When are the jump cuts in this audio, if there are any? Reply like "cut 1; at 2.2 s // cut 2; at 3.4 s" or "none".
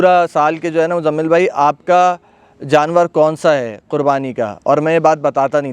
none